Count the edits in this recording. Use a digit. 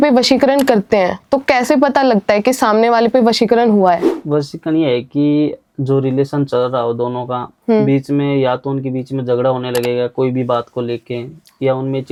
0